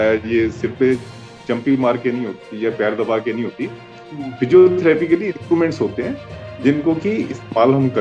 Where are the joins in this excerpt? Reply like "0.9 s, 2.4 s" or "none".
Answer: none